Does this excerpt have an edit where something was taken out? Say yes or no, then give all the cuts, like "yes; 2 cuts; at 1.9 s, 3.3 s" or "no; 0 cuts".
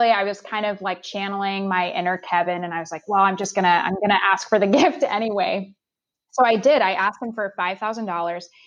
no; 0 cuts